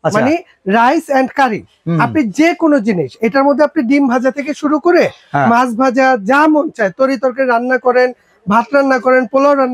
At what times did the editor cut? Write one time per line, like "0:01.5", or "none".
none

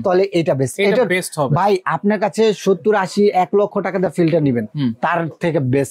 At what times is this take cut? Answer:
none

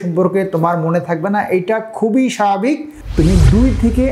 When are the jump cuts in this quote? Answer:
0:03.0

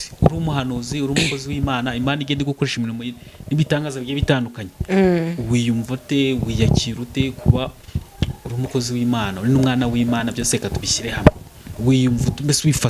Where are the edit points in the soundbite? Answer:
none

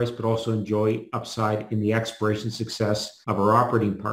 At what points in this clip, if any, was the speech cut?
0:03.1

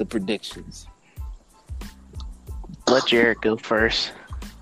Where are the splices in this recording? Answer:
0:00.8
0:02.6

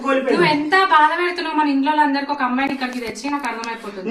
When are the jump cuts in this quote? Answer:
none

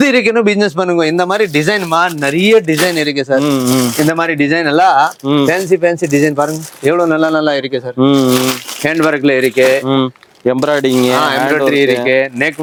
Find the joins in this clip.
none

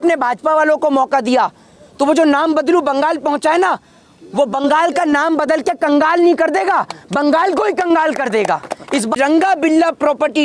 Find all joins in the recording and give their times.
0:09.1

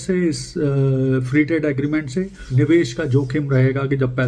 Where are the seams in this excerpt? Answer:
0:02.4

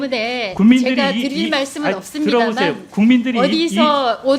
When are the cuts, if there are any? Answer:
none

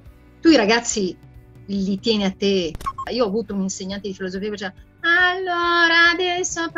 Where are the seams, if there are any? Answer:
0:03.0

